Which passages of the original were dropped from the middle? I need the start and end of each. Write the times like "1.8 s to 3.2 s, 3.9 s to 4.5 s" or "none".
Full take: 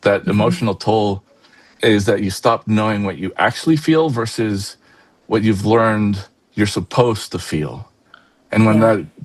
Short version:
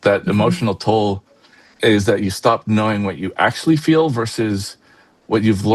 none